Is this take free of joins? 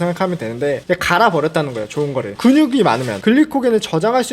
no; 1 cut; at 2.3 s

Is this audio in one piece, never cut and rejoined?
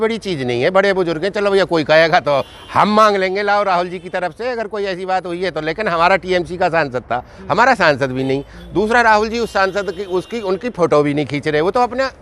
yes; 0 cuts

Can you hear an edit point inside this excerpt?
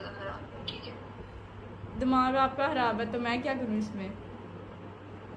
no; 0 cuts

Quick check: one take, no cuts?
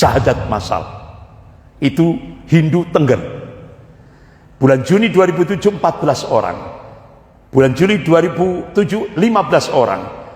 yes; 0 cuts

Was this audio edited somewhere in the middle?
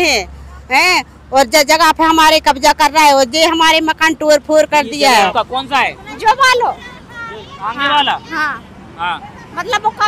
yes; 1 cut; at 5.3 s

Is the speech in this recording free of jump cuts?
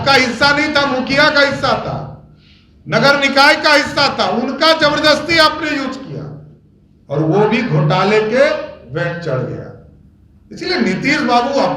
yes; 0 cuts

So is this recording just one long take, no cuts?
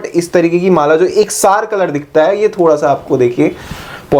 yes; 0 cuts

